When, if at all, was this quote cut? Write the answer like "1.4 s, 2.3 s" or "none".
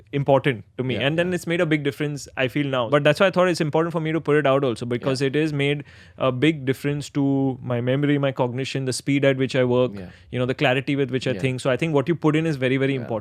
2.9 s